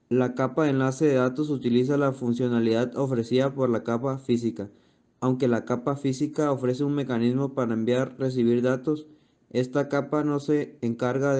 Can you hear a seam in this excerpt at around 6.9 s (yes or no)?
yes